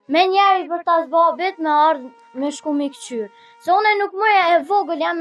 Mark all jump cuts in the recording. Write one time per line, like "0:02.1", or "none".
none